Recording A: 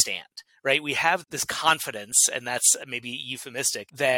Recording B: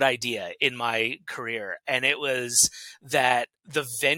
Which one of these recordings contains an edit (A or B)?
A